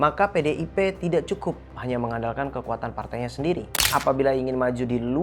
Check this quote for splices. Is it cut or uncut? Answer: cut